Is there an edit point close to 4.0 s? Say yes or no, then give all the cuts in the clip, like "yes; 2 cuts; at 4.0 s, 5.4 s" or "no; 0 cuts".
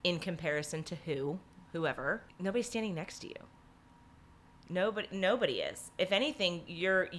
no; 1 cut; at 2.3 s